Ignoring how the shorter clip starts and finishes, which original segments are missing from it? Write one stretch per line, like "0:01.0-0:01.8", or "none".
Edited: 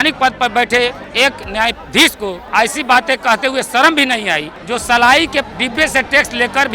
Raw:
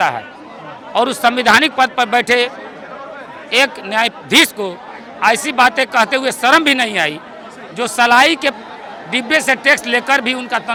0:02.6-0:03.4
0:04.8-0:05.1
0:07.2-0:07.6
0:08.6-0:09.1